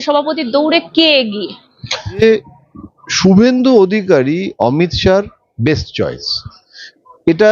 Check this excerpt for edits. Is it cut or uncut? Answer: cut